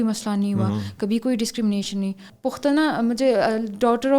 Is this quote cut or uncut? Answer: cut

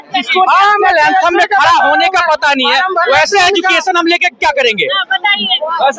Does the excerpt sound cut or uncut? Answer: uncut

